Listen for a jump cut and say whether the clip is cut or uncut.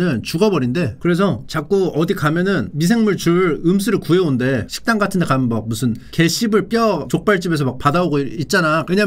uncut